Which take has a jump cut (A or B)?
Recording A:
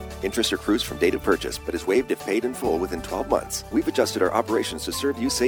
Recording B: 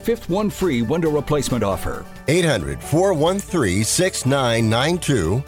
A